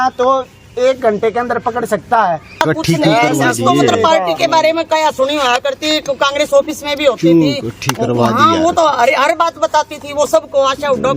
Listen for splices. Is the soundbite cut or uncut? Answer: cut